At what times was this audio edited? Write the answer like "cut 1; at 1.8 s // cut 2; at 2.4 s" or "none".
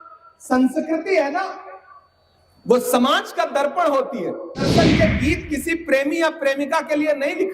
cut 1; at 4.7 s